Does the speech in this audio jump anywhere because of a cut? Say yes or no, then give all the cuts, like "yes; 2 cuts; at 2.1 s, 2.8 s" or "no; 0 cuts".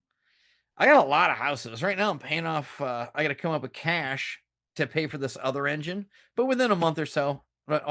no; 0 cuts